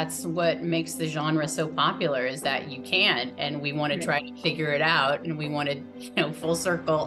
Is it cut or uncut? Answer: uncut